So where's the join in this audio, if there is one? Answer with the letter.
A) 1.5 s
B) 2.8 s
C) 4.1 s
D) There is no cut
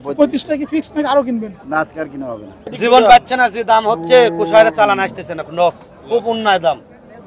B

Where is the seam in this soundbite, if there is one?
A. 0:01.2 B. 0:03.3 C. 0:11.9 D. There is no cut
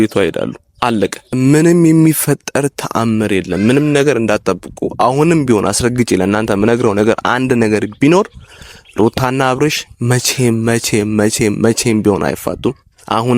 A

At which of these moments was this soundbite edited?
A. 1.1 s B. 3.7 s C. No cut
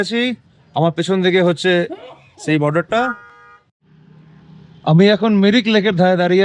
B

